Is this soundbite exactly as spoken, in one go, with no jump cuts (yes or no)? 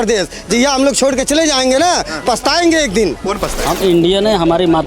no